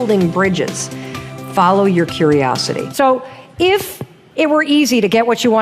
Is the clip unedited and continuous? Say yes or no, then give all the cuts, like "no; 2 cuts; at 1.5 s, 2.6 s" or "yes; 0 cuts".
no; 1 cut; at 2.9 s